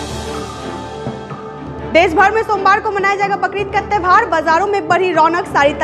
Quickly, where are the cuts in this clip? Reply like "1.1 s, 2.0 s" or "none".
1.4 s